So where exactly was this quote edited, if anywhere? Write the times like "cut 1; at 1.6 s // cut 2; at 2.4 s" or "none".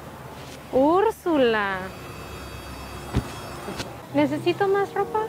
cut 1; at 4.0 s